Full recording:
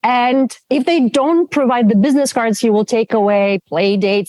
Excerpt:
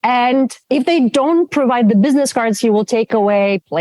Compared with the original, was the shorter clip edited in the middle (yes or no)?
no